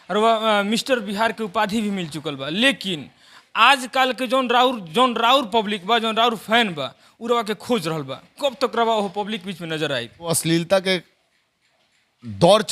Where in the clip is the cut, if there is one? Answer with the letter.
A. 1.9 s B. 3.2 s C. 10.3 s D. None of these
C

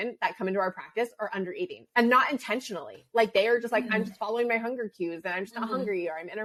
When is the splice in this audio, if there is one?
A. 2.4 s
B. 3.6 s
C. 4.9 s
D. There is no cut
D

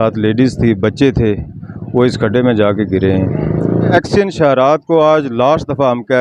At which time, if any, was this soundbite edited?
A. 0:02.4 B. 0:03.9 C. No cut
B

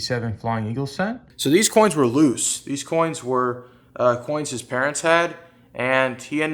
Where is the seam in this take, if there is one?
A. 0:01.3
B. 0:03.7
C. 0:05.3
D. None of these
A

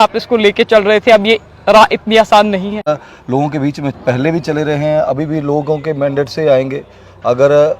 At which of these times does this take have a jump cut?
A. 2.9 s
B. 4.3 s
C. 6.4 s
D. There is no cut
A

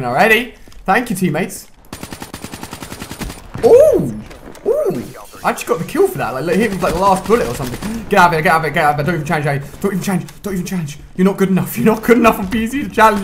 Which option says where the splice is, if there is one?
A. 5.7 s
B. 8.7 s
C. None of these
B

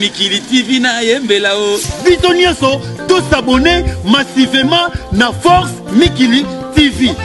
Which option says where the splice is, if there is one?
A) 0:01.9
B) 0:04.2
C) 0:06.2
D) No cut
A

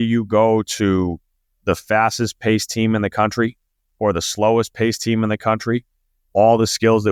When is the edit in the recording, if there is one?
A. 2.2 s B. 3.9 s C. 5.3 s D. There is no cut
D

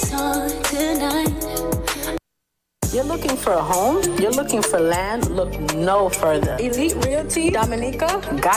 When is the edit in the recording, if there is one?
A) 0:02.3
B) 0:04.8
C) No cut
A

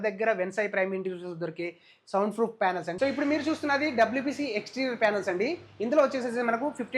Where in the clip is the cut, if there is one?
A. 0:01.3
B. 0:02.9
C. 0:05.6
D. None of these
B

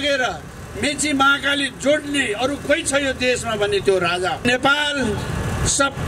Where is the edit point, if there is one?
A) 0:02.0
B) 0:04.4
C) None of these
B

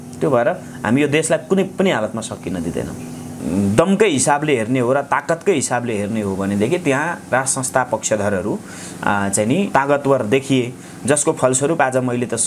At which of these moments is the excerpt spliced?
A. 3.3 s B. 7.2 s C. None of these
A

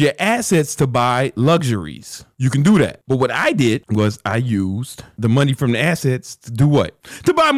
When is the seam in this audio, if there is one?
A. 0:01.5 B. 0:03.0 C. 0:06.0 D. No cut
B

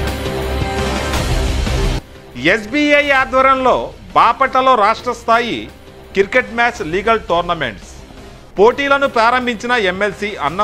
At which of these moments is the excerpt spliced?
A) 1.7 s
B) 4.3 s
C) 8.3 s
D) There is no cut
A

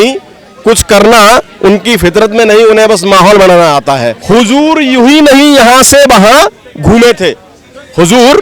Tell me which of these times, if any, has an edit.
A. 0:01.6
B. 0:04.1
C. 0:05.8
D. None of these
B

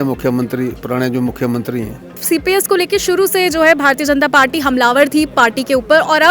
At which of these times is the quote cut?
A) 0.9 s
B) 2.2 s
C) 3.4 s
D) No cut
B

